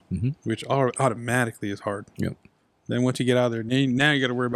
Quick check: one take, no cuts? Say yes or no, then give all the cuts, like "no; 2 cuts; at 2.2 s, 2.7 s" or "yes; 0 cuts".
yes; 0 cuts